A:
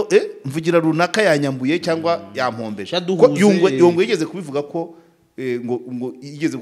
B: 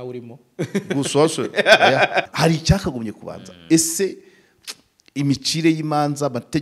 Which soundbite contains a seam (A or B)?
B